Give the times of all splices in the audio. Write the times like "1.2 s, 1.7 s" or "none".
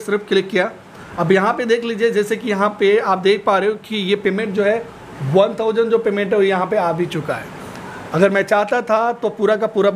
1.0 s